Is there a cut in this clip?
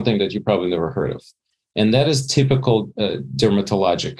no; 0 cuts

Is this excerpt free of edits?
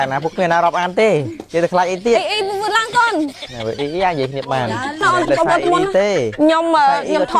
no; 1 cut; at 5.0 s

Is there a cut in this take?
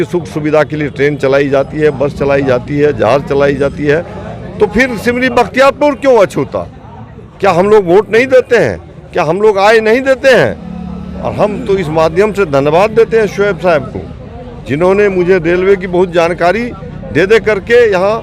no; 0 cuts

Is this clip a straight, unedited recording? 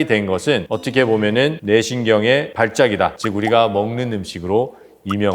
no; 1 cut; at 3.2 s

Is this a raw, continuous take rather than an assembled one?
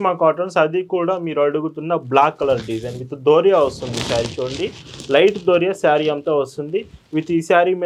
yes; 0 cuts

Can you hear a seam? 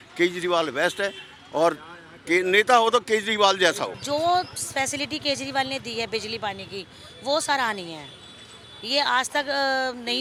no; 0 cuts

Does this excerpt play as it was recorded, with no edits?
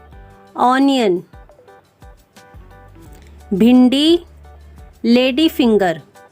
no; 2 cuts; at 1.3 s, 2.8 s

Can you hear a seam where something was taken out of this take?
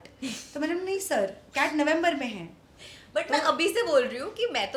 no; 0 cuts

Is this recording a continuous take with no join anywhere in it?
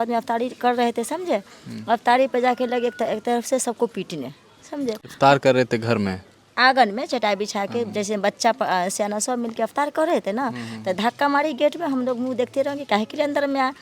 yes; 0 cuts

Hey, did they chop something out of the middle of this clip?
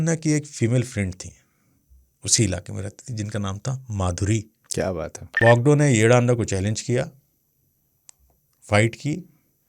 yes; 1 cut; at 5.3 s

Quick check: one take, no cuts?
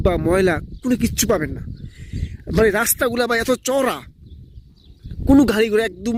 yes; 0 cuts

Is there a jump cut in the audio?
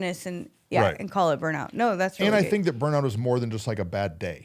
no; 0 cuts

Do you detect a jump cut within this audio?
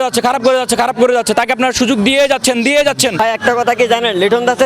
yes; 1 cut; at 3.2 s

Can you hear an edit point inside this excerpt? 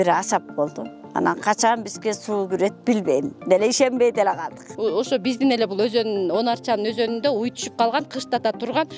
yes; 1 cut; at 4.7 s

